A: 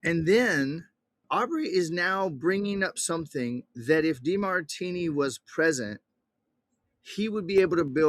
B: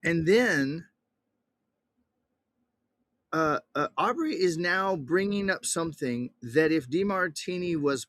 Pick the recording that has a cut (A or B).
A